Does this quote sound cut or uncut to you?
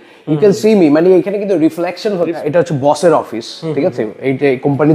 cut